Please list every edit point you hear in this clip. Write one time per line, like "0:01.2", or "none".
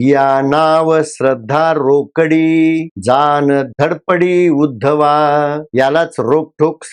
0:05.6